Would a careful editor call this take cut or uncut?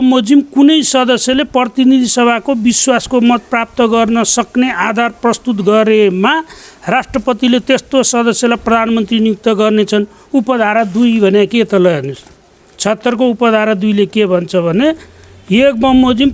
uncut